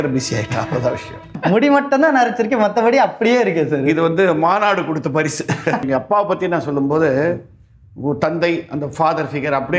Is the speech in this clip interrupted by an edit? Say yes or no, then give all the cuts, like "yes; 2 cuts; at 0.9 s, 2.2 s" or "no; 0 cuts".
yes; 2 cuts; at 1.3 s, 5.8 s